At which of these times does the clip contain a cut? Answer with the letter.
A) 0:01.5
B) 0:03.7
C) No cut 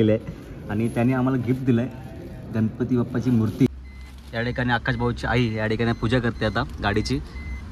B